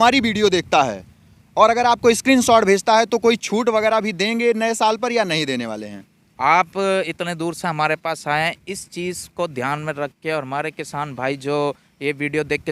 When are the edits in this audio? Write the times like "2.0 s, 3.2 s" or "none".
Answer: none